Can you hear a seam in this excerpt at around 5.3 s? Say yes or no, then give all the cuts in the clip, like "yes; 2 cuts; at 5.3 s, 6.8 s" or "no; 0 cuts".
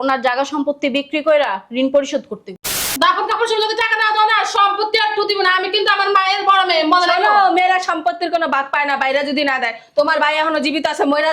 no; 1 cut; at 2.9 s